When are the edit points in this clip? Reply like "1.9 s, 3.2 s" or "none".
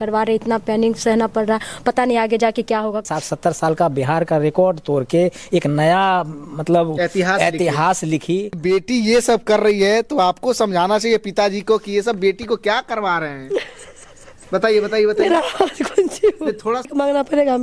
3.0 s, 8.6 s, 16.9 s